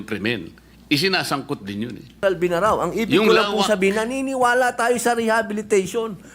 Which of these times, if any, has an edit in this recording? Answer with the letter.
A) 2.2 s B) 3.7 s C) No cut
A